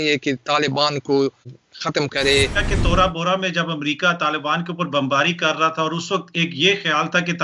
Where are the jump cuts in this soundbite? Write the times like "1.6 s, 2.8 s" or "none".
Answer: 1.5 s, 2.6 s